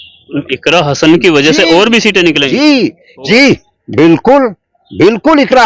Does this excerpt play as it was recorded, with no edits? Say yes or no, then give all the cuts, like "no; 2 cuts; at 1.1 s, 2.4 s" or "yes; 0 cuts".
no; 1 cut; at 3.1 s